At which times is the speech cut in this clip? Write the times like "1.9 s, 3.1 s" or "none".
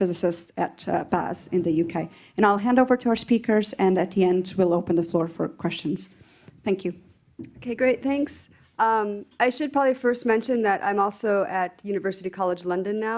none